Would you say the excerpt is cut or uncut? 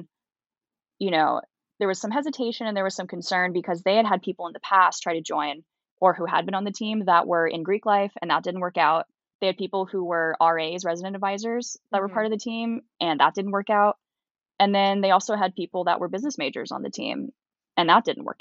cut